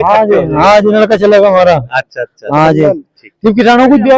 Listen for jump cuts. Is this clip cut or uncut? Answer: uncut